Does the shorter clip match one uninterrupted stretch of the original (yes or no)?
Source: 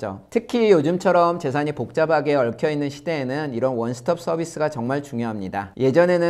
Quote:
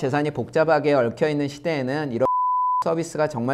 yes